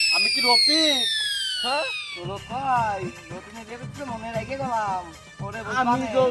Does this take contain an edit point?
yes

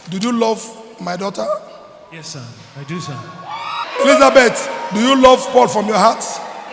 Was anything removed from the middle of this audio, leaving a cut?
yes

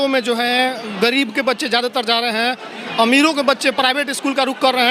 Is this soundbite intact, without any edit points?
yes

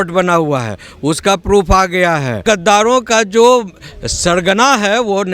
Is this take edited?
yes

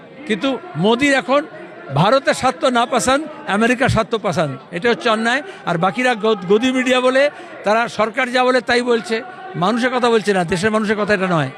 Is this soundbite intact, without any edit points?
yes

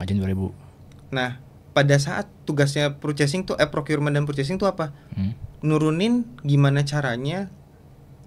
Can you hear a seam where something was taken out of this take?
no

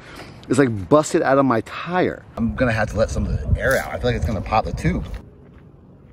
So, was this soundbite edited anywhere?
yes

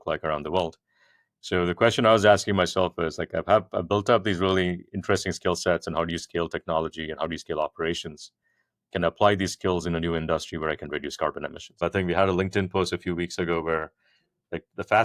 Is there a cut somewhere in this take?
yes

